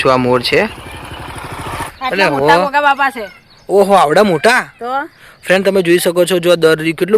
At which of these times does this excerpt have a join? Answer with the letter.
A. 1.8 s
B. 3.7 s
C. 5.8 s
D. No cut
A